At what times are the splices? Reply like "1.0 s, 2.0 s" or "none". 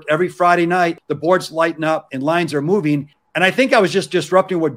1.0 s, 2.1 s, 3.2 s